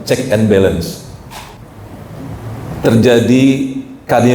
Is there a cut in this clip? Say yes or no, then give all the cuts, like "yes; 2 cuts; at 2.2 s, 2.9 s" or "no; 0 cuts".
yes; 1 cut; at 1.6 s